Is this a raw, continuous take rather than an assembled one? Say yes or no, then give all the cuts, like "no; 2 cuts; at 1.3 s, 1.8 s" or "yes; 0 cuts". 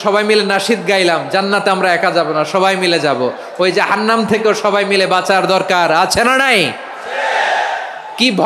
yes; 0 cuts